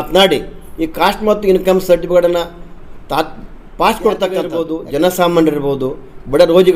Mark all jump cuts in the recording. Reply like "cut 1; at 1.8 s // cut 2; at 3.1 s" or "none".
cut 1; at 4.6 s